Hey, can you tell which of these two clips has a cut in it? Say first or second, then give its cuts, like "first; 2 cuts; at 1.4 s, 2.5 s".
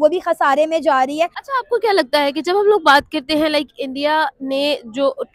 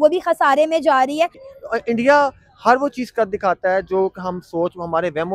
second; 1 cut; at 1.4 s